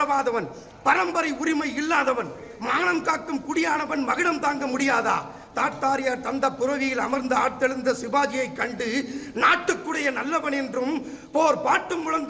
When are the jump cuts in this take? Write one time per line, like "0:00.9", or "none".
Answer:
none

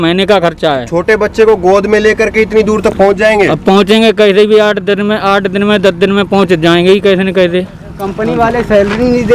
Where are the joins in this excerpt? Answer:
0:08.0

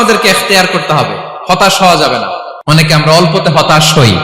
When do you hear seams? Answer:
0:02.5

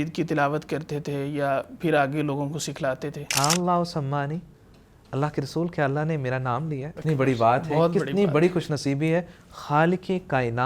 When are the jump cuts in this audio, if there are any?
0:03.3
0:06.9

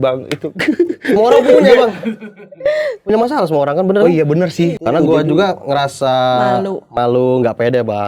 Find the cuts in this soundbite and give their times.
0:04.8

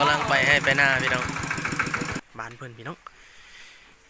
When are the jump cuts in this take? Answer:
0:02.2

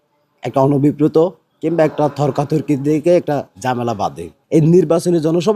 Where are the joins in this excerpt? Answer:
0:04.3

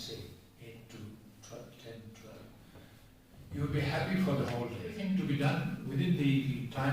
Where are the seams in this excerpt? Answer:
0:04.9

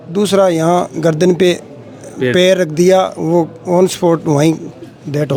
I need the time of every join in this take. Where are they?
none

